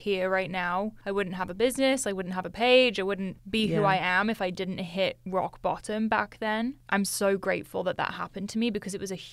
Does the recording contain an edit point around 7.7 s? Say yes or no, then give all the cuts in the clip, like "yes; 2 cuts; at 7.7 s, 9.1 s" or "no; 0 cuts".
no; 2 cuts; at 1.0 s, 3.3 s